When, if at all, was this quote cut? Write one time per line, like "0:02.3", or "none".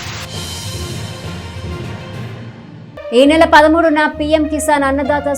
0:02.4